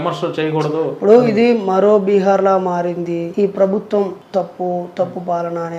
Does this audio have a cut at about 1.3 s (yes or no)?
no